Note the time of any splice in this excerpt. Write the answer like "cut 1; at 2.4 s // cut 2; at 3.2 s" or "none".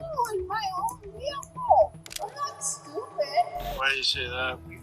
cut 1; at 3.6 s